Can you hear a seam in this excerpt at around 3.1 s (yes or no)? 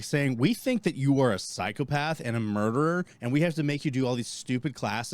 yes